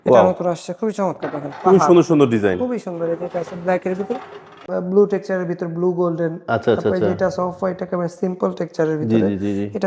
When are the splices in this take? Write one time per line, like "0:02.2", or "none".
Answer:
0:04.6